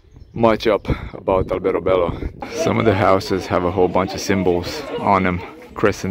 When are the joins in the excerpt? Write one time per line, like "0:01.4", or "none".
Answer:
0:02.3